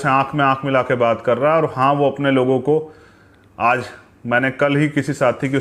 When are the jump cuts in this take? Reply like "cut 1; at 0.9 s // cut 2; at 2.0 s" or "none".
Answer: none